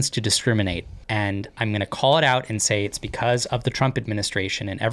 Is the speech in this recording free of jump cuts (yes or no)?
no